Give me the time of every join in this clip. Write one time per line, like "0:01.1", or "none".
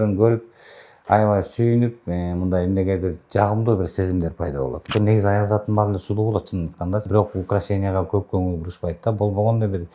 0:04.8
0:07.1